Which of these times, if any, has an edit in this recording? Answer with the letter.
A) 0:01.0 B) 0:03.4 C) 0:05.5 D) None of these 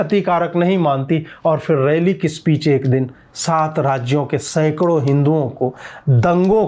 D